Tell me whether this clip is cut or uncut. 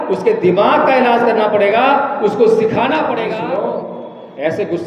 cut